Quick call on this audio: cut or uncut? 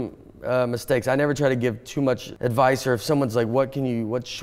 cut